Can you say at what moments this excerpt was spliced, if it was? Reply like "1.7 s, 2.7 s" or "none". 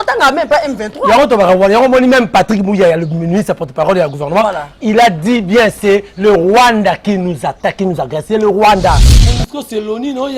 9.0 s